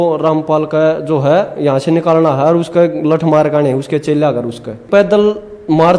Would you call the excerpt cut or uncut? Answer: cut